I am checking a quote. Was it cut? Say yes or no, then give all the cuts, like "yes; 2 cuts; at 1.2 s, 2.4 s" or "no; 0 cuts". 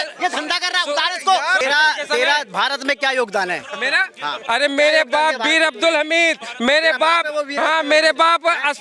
yes; 1 cut; at 1.6 s